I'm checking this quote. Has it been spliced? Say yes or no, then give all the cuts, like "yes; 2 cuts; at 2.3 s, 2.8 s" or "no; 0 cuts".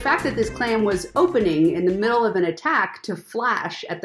no; 0 cuts